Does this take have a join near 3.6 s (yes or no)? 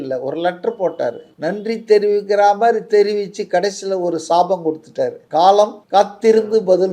no